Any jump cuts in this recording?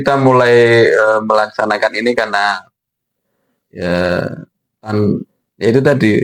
no; 0 cuts

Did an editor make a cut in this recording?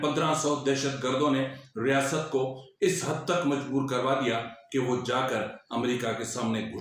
no; 0 cuts

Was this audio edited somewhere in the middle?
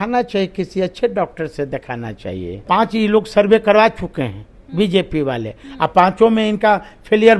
yes; 1 cut; at 2.6 s

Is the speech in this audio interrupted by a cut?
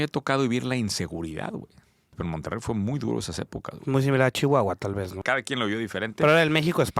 yes; 2 cuts; at 2.2 s, 5.2 s

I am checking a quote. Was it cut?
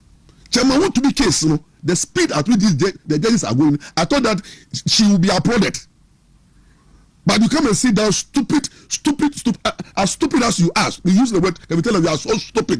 no; 0 cuts

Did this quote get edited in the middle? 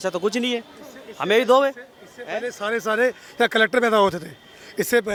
no; 0 cuts

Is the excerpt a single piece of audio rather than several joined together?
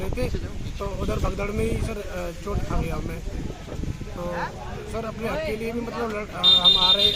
yes; 0 cuts

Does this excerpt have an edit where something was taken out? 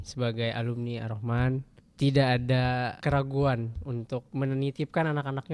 yes; 3 cuts; at 1.8 s, 3.0 s, 4.3 s

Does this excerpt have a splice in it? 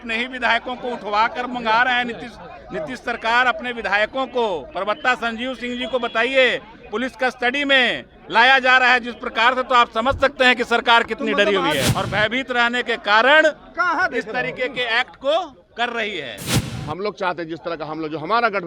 yes; 2 cuts; at 11.9 s, 16.6 s

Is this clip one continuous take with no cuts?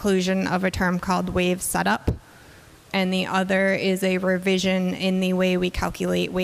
yes; 0 cuts

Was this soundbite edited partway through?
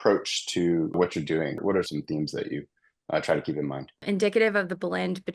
yes; 2 cuts; at 1.8 s, 4.0 s

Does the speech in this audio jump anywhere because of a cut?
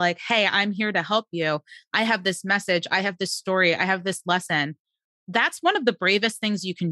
no; 0 cuts

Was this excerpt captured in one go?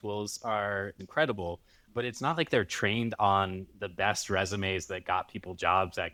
yes; 0 cuts

